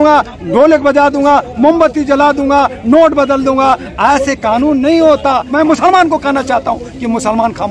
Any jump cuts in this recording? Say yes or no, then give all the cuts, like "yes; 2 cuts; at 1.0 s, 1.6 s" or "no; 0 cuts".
yes; 1 cut; at 5.5 s